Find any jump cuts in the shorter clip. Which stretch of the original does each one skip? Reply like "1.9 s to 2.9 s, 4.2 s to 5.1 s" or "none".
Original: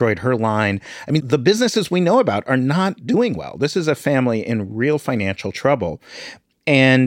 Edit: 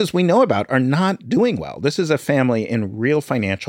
none